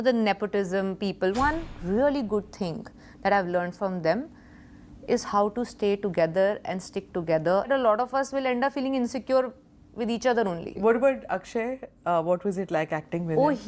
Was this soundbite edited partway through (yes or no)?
yes